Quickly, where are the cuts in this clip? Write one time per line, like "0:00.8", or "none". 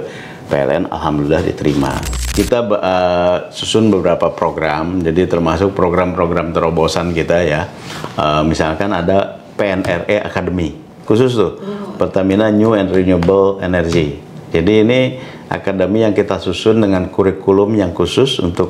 0:02.1